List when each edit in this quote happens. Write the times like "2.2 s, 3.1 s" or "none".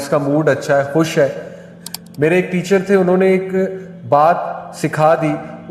1.6 s